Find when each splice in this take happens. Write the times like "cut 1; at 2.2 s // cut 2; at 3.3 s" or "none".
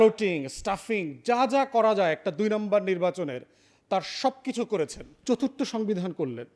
cut 1; at 5.1 s